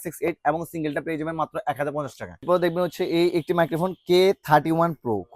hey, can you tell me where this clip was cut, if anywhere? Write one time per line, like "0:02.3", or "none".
0:02.4